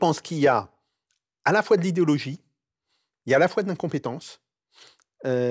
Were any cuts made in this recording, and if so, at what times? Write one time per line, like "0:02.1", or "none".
none